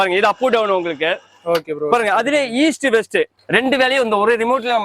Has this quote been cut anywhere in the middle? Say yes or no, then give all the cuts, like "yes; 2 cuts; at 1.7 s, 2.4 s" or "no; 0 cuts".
yes; 1 cut; at 3.4 s